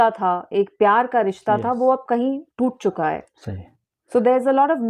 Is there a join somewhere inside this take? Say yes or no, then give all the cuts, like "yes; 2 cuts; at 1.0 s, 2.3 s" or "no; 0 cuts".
no; 0 cuts